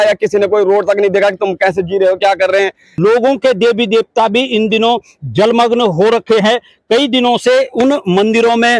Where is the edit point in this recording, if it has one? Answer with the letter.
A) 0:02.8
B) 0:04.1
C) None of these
A